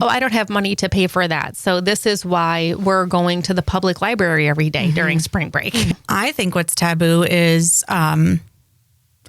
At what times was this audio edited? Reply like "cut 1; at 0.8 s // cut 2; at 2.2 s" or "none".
cut 1; at 5.9 s